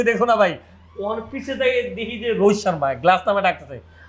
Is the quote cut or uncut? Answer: uncut